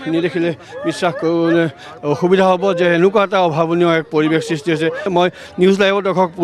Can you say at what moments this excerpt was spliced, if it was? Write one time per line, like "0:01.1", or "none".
0:05.1